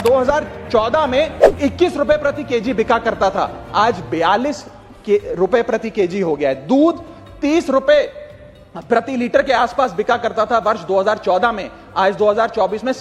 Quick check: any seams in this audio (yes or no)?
no